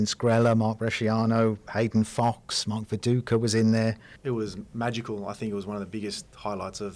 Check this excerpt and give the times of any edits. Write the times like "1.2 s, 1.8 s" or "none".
4.1 s